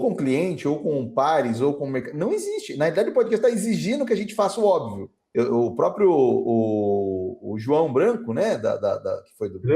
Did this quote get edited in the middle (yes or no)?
yes